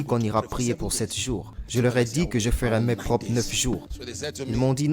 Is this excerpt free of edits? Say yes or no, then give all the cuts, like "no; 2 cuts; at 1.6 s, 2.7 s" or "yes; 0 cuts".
no; 2 cuts; at 1.6 s, 4.0 s